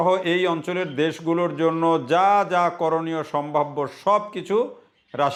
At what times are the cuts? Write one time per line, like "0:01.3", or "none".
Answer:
none